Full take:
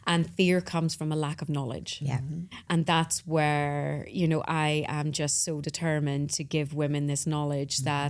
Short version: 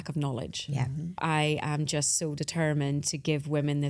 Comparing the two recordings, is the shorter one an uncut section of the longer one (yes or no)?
no